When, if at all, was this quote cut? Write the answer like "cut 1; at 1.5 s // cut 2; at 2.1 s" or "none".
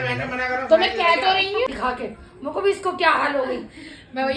cut 1; at 1.7 s